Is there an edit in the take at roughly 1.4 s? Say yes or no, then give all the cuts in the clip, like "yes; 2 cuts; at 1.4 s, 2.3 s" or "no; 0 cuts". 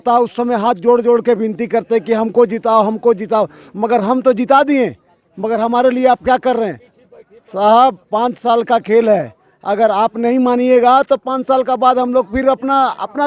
no; 0 cuts